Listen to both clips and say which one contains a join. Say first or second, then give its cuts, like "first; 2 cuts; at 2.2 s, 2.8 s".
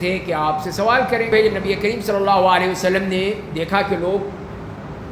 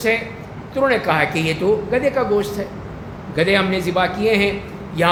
first; 1 cut; at 1.6 s